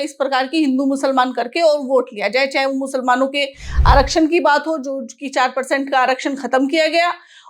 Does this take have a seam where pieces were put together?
no; 0 cuts

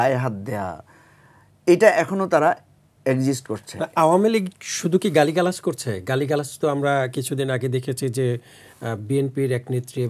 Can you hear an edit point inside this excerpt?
no; 0 cuts

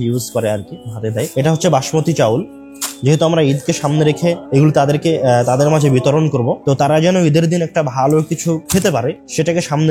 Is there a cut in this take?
yes; 3 cuts; at 4.4 s, 6.6 s, 8.9 s

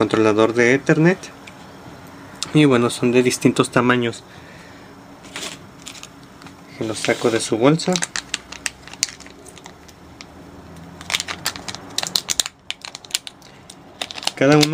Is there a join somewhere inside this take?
no; 0 cuts

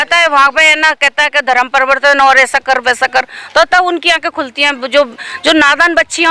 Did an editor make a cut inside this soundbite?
no; 0 cuts

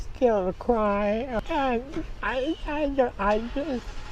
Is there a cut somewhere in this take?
no; 0 cuts

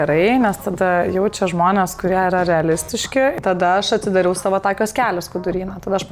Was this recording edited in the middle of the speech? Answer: yes; 1 cut; at 3.3 s

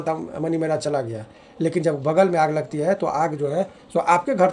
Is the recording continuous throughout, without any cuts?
yes; 0 cuts

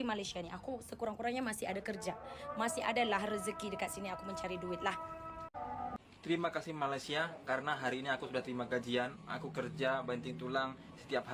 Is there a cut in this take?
yes; 1 cut; at 5.9 s

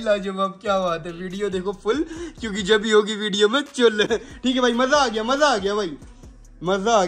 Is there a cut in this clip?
no; 0 cuts

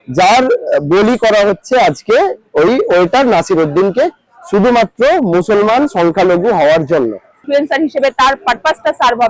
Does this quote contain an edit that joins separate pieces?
yes; 1 cut; at 7.4 s

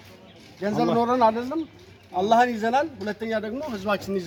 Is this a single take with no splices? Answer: yes; 0 cuts

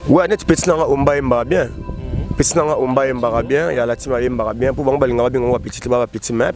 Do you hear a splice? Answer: no; 0 cuts

